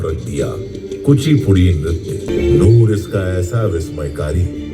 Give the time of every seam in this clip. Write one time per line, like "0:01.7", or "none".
0:02.3